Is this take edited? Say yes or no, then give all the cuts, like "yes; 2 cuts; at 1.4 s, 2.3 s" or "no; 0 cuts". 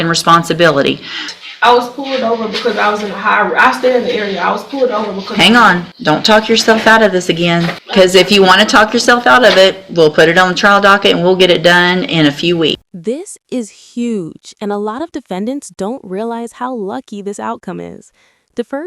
yes; 4 cuts; at 1.3 s, 5.9 s, 7.8 s, 12.9 s